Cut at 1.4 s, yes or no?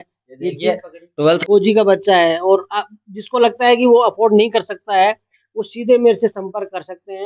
yes